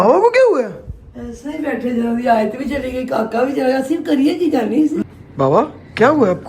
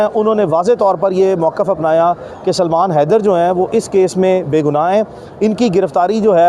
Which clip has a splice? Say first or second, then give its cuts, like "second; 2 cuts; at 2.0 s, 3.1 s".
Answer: first; 1 cut; at 5.0 s